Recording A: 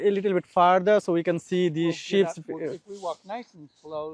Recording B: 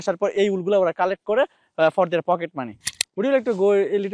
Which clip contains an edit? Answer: B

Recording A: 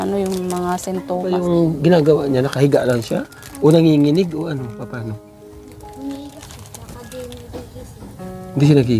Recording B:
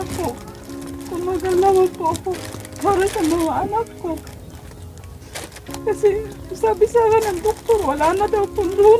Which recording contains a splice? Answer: A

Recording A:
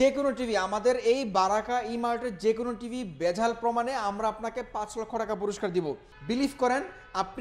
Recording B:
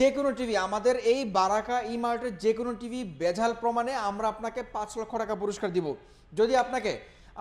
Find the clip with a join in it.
A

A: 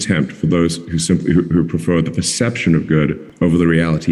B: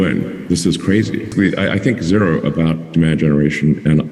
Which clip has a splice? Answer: B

